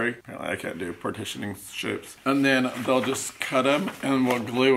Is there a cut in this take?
no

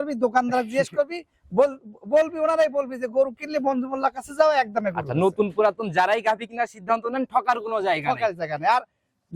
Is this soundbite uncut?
yes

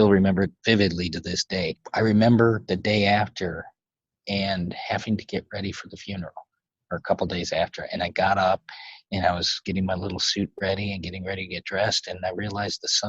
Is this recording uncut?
no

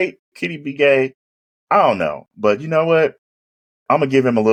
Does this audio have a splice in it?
no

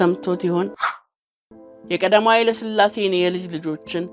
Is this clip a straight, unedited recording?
no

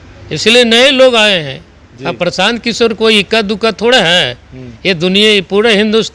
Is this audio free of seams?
yes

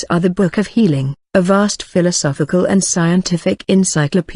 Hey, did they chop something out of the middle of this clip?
no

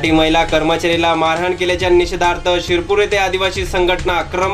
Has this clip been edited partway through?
no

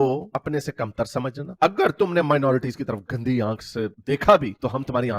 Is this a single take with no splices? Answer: yes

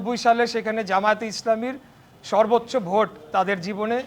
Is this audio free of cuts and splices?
yes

